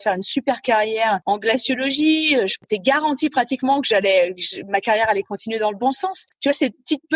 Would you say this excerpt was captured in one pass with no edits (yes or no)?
no